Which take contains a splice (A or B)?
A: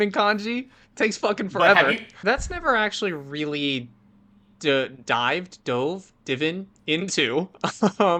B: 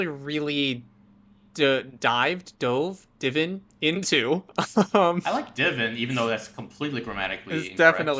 A